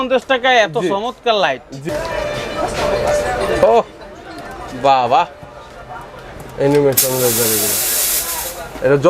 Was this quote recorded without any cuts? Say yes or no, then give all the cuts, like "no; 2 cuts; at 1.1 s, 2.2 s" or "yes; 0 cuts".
no; 1 cut; at 1.8 s